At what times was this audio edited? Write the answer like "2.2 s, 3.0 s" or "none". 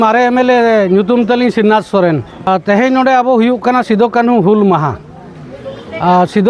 2.5 s